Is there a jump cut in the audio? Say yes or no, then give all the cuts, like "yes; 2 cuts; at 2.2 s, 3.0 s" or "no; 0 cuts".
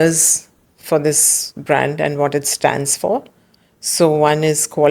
no; 0 cuts